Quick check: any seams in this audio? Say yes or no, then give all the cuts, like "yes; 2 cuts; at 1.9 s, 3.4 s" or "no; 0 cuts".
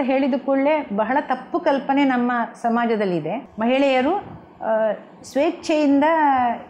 yes; 1 cut; at 3.4 s